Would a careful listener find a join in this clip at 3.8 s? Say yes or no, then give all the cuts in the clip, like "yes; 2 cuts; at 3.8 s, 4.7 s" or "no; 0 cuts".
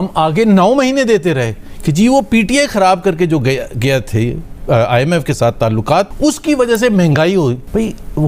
no; 0 cuts